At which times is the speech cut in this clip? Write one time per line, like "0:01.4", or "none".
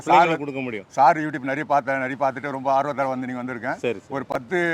none